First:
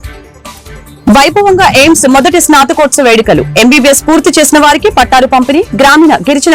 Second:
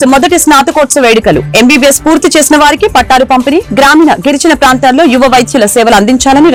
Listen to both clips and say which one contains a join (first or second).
first